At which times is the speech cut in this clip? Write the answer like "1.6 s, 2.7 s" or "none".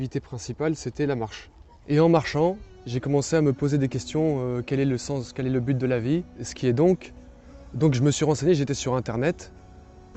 6.5 s